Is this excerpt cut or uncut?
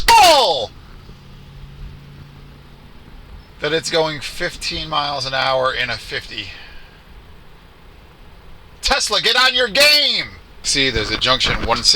cut